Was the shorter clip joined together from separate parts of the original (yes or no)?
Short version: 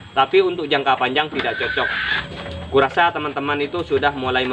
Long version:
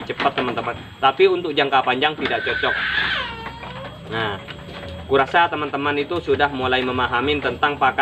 yes